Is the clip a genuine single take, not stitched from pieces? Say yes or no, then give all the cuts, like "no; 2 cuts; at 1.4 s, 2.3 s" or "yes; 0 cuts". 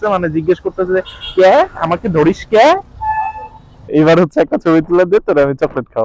no; 1 cut; at 3.9 s